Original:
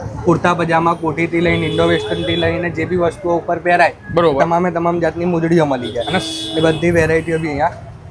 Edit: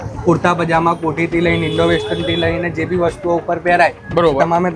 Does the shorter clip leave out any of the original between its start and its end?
no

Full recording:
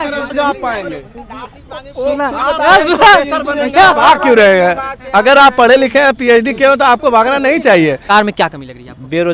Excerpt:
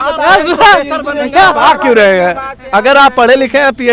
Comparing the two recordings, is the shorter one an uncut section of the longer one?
yes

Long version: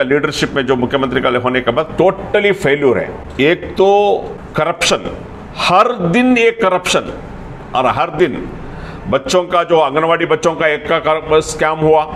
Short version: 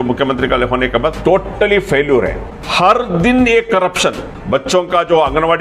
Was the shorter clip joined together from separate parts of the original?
yes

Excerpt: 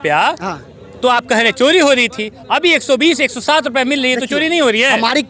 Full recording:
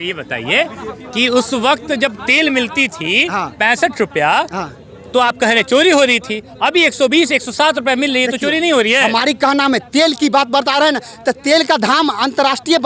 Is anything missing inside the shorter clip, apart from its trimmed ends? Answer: no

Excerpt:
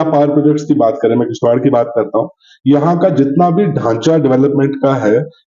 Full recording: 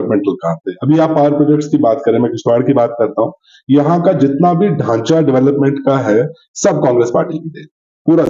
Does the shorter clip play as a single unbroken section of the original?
yes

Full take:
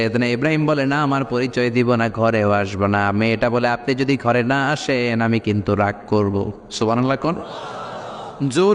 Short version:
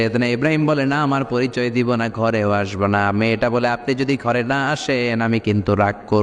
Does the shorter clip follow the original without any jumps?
yes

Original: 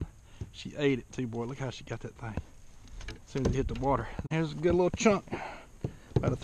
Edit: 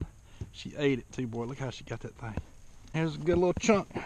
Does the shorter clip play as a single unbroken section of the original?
no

